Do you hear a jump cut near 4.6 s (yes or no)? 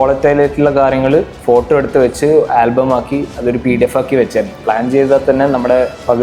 yes